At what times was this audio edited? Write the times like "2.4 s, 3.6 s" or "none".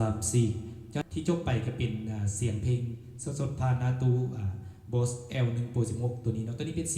1.0 s